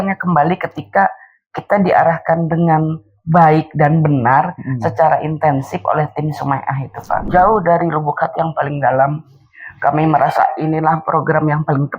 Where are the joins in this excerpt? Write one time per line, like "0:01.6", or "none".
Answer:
0:07.2